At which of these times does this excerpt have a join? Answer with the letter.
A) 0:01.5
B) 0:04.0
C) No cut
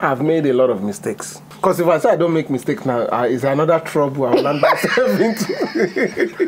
A